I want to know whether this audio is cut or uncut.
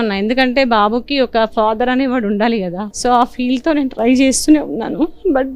cut